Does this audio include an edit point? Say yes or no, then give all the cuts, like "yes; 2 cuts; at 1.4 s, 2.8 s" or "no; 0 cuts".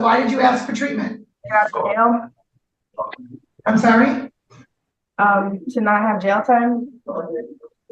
yes; 1 cut; at 1.4 s